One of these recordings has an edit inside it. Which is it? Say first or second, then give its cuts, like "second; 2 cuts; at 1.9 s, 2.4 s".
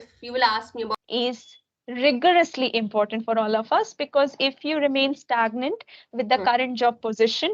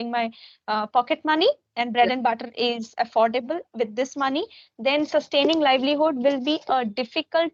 first; 1 cut; at 1.0 s